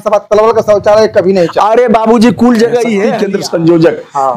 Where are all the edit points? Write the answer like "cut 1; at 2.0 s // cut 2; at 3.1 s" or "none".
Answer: cut 1; at 3.1 s